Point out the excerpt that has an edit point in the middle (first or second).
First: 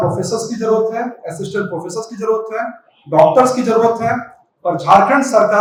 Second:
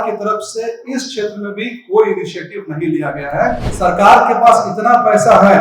second